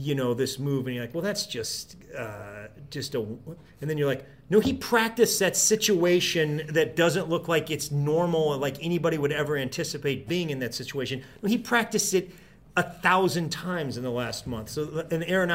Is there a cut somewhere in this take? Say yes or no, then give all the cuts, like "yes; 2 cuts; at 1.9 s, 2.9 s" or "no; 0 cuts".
no; 0 cuts